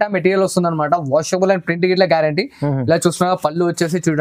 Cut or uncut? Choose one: uncut